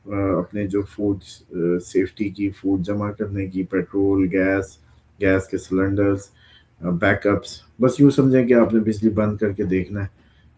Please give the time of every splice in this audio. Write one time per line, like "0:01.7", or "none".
none